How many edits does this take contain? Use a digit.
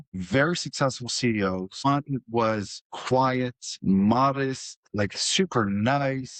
0